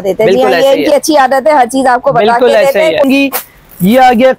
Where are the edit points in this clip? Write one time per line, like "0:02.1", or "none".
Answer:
0:03.0